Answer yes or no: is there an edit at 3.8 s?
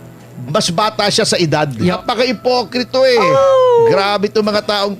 no